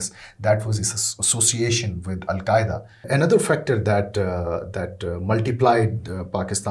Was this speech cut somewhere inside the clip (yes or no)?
yes